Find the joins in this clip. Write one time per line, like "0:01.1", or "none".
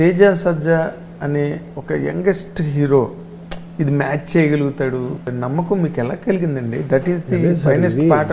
0:05.3